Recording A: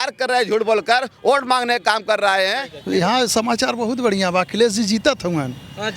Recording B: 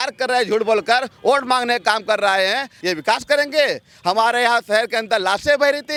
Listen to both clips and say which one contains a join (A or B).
A